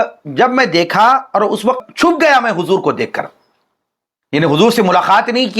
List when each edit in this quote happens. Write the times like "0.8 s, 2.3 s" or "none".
1.8 s